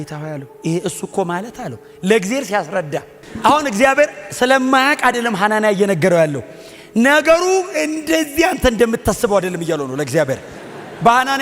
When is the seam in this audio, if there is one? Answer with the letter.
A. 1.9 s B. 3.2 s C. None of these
B